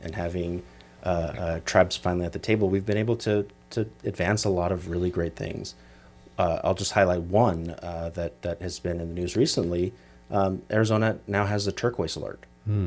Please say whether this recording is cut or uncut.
uncut